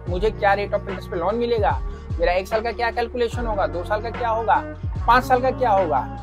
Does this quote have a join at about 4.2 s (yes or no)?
no